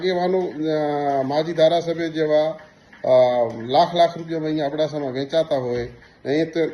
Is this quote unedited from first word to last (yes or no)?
yes